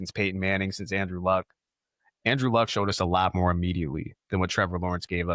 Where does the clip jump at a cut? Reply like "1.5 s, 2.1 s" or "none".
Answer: none